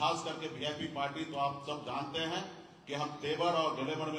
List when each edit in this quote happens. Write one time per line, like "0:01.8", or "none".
none

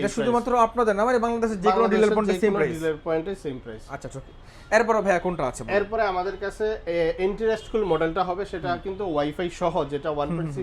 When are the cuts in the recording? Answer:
none

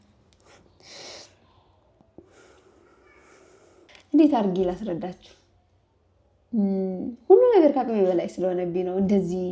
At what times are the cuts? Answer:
0:03.9

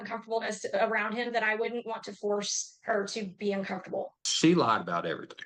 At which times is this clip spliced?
0:04.2

